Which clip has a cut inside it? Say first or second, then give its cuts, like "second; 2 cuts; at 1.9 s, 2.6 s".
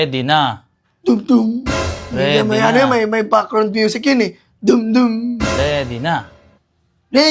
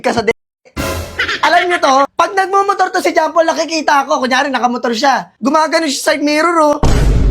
second; 2 cuts; at 2.1 s, 5.3 s